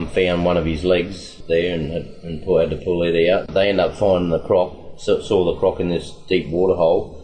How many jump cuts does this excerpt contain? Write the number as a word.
two